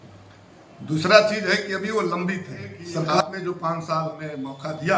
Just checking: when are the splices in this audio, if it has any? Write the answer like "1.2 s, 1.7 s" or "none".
3.2 s